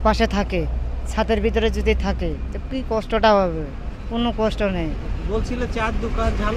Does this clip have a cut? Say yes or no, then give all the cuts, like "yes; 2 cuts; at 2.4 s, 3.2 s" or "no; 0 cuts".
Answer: no; 0 cuts